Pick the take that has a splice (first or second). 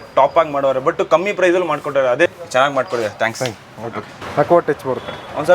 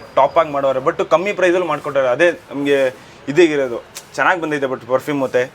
first